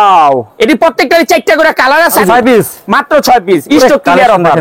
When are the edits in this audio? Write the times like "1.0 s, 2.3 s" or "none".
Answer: 2.2 s